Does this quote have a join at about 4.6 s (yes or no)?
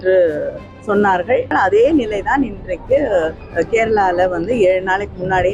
no